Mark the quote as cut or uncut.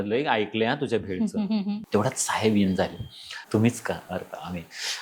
cut